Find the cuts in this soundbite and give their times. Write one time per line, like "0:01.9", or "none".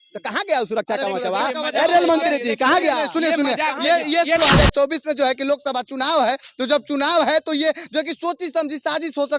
0:04.4